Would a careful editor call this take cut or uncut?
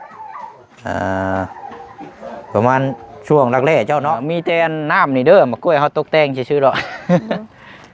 cut